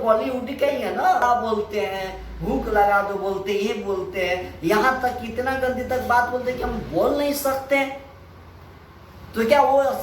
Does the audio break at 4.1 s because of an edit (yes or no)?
no